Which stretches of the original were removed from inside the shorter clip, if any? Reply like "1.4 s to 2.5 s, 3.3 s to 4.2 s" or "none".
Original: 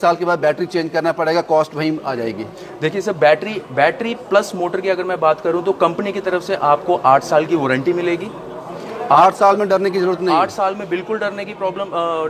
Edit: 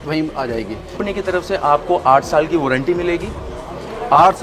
2.7 s to 6.0 s